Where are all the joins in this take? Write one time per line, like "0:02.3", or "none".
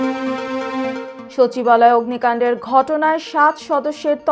0:01.2